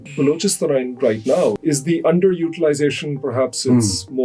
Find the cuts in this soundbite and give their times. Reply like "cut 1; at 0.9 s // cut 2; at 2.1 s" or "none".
cut 1; at 1.6 s